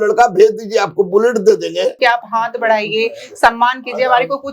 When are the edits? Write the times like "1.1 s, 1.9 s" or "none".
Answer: 2.0 s